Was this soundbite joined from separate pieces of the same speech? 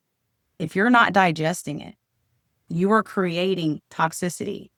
no; 0 cuts

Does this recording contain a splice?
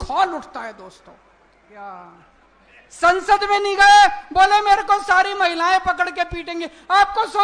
yes; 1 cut; at 1.7 s

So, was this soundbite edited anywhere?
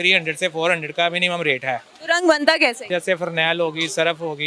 yes; 2 cuts; at 1.9 s, 2.9 s

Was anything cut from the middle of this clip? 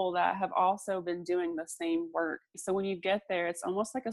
yes; 1 cut; at 2.5 s

